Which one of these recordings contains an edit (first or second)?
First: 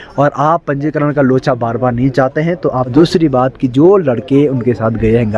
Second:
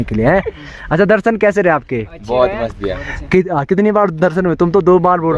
first